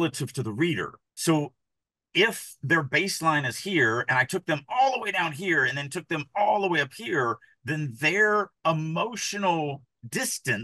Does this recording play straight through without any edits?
no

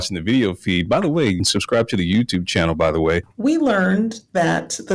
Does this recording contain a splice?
yes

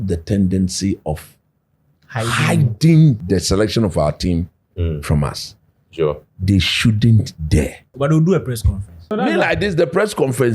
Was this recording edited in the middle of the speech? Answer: yes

